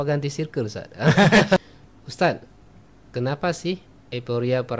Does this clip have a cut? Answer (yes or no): yes